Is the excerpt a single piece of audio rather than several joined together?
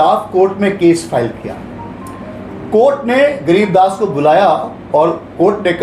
yes; 0 cuts

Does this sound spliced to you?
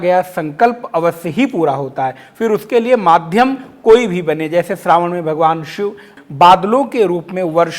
yes; 1 cut; at 6.1 s

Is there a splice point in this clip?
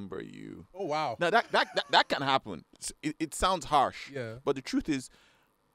no; 0 cuts

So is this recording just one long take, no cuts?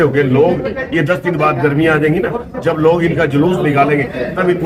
yes; 0 cuts

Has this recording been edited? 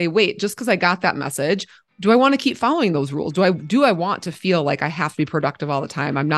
yes; 1 cut; at 1.8 s

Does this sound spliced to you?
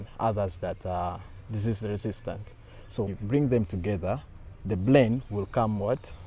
yes; 1 cut; at 3.1 s

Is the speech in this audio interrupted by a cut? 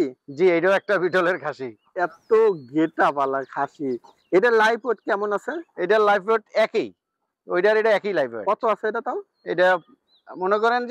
no; 0 cuts

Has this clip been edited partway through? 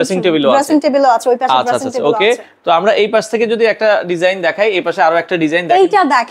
no; 0 cuts

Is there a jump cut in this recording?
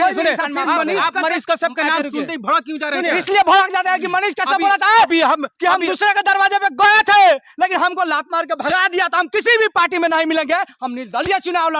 no; 0 cuts

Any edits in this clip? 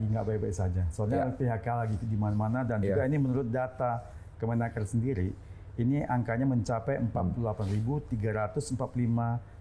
no; 0 cuts

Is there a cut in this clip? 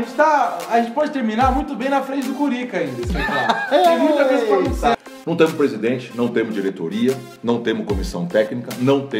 yes; 1 cut; at 4.9 s

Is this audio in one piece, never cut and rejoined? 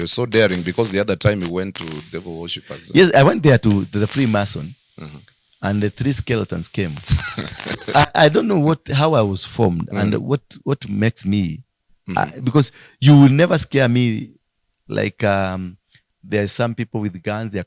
yes; 0 cuts

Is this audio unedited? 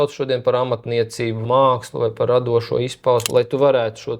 no; 2 cuts; at 1.4 s, 3.3 s

